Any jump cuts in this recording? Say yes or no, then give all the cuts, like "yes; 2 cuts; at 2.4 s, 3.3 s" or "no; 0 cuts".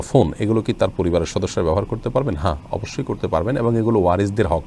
no; 0 cuts